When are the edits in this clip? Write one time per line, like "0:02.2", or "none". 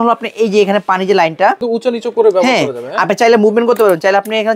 0:01.6